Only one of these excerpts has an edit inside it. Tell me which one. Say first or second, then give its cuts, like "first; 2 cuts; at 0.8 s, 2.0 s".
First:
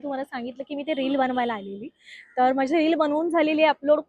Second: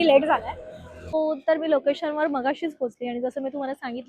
second; 1 cut; at 1.1 s